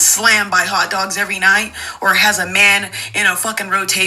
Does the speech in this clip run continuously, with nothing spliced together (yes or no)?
no